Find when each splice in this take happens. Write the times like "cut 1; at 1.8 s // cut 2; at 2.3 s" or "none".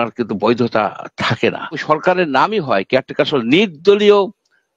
cut 1; at 1.8 s